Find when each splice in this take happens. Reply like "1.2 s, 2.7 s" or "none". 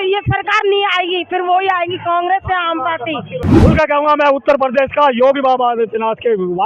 3.4 s